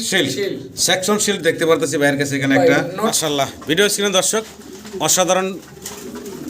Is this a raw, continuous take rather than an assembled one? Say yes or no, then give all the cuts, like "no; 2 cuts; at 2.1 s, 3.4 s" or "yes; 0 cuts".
no; 1 cut; at 3.1 s